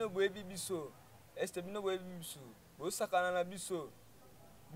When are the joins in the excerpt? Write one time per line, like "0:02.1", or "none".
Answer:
none